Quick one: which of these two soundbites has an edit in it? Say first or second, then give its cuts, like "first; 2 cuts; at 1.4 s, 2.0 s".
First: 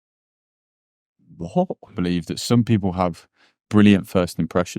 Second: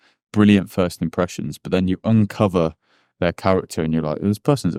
first; 1 cut; at 2.0 s